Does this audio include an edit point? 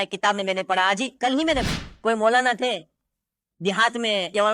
yes; 1 cut; at 1.6 s

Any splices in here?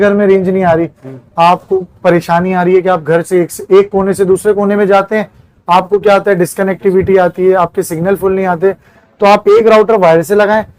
no; 0 cuts

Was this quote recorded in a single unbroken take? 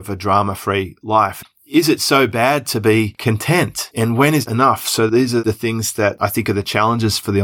no; 1 cut; at 1.6 s

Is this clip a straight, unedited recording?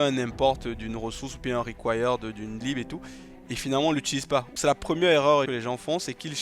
no; 2 cuts; at 4.5 s, 5.5 s

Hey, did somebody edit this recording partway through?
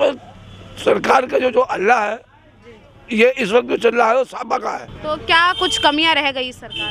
yes; 1 cut; at 4.9 s

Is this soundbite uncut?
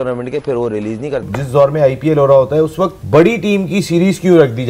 no; 2 cuts; at 1.3 s, 3.0 s

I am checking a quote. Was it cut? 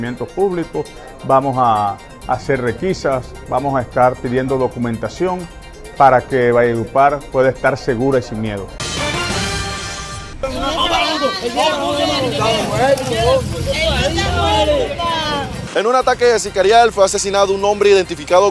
yes; 2 cuts; at 8.8 s, 10.4 s

